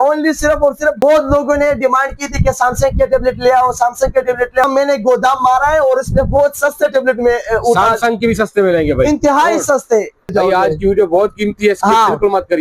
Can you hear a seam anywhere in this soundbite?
yes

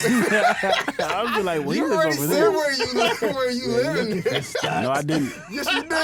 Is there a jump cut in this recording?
no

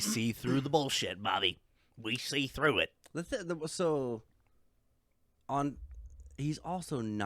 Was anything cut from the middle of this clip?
no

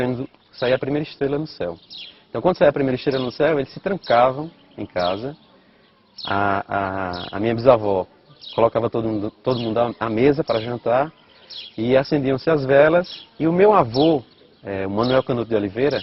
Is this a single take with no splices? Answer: yes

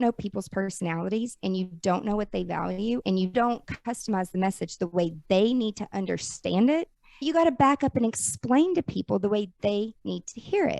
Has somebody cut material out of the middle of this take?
yes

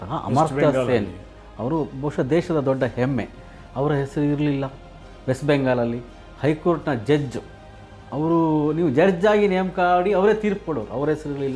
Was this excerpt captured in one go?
yes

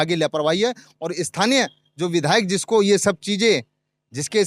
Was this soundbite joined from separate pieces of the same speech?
no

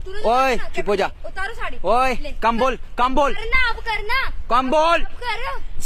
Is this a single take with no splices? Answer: yes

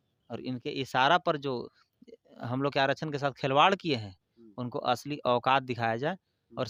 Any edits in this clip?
no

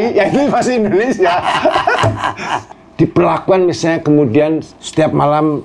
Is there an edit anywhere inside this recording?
yes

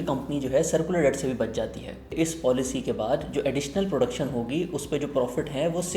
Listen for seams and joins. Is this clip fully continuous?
no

